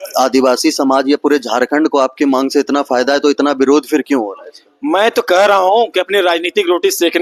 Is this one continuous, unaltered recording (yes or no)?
yes